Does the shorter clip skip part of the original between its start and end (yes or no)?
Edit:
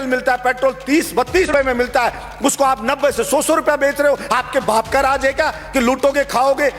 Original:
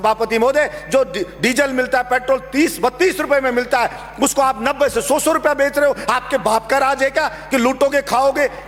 yes